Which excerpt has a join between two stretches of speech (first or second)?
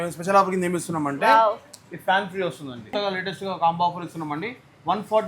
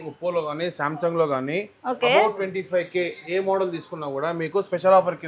first